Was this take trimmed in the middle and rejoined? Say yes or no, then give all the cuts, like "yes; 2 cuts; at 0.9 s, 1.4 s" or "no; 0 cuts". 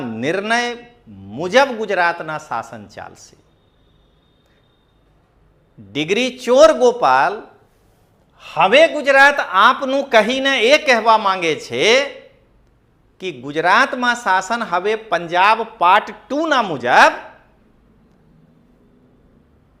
no; 0 cuts